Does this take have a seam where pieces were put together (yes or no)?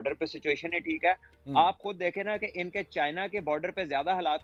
no